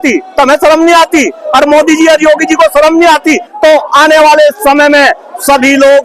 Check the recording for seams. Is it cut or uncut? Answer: cut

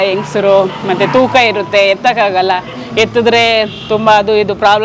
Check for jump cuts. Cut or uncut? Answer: uncut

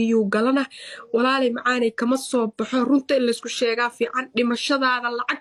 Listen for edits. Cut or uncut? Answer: uncut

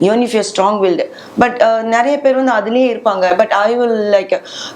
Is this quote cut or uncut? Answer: uncut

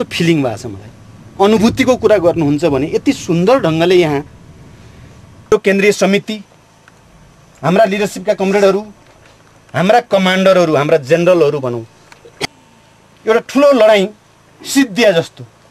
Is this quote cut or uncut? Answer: cut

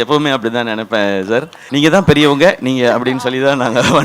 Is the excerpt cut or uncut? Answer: cut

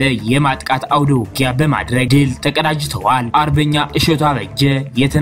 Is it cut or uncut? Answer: cut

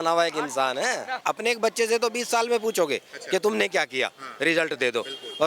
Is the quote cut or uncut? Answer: cut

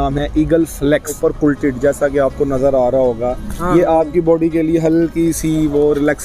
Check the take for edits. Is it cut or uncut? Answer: cut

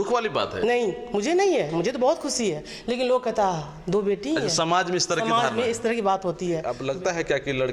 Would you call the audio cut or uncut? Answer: cut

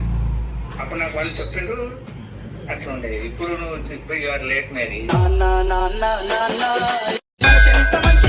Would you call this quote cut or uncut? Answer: uncut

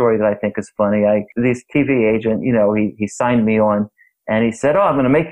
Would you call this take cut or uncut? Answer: cut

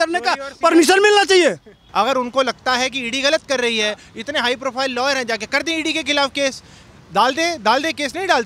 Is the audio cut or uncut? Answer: cut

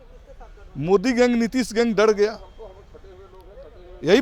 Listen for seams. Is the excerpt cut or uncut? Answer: uncut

